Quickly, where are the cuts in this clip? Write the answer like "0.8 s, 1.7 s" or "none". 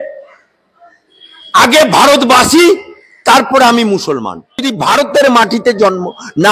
4.6 s

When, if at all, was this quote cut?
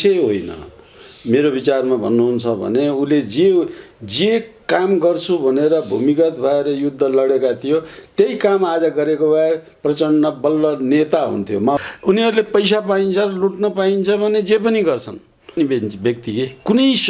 11.8 s, 15.6 s

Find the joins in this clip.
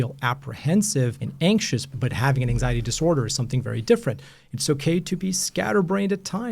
1.2 s, 1.9 s

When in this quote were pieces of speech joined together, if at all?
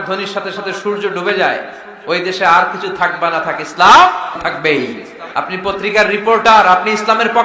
4.4 s, 5.2 s

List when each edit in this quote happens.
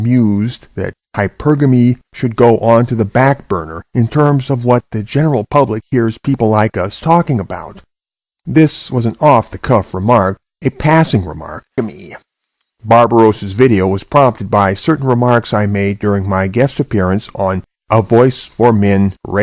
none

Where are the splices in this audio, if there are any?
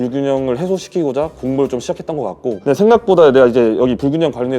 2.5 s

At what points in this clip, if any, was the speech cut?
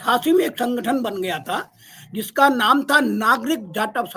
none

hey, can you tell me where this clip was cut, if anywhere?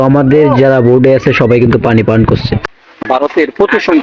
2.6 s

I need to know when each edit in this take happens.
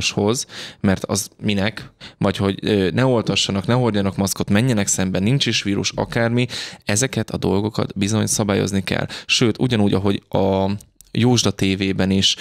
none

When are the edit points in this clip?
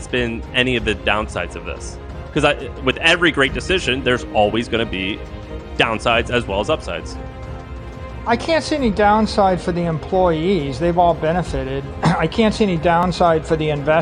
none

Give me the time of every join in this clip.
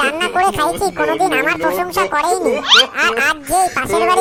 none

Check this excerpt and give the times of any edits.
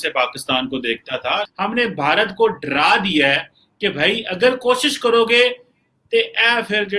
1.5 s

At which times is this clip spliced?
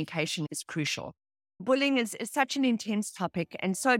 1.6 s

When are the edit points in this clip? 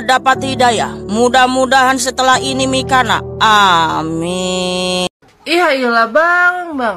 5.1 s

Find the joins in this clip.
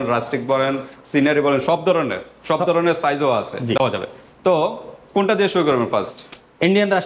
none

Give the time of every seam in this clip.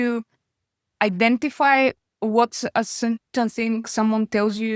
2.0 s

